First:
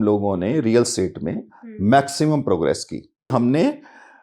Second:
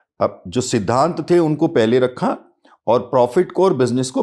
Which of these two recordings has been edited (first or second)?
first